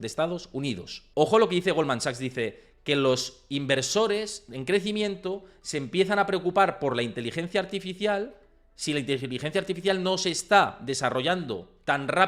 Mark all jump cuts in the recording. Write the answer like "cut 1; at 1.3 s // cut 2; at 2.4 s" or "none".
cut 1; at 0.9 s